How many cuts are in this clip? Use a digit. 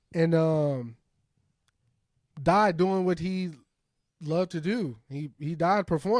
0